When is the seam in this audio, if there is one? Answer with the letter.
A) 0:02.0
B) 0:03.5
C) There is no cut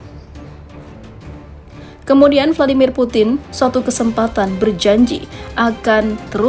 A